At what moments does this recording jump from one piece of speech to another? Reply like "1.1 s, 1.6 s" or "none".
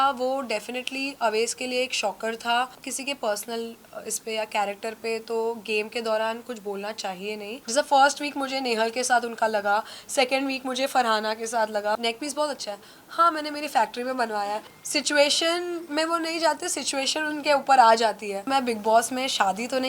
2.9 s, 7.5 s, 12.0 s, 14.7 s, 18.4 s